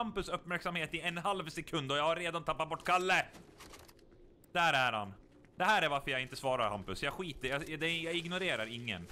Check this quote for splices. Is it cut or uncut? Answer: uncut